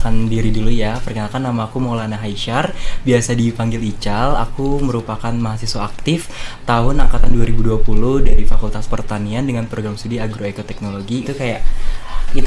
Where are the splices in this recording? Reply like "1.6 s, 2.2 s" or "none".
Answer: 11.2 s